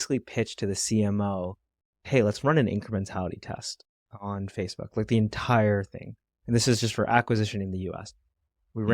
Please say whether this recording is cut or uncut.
cut